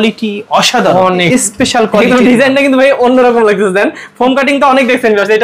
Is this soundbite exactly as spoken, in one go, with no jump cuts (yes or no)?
no